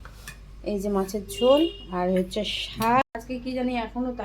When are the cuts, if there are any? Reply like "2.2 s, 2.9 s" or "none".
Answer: 3.1 s